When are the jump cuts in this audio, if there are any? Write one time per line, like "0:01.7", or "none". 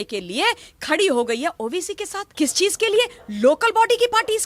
0:02.2